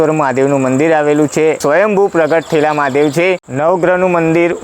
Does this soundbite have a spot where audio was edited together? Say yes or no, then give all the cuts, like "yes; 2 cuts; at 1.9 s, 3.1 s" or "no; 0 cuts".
yes; 2 cuts; at 1.6 s, 3.4 s